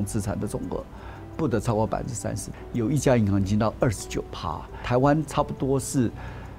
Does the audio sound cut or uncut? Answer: cut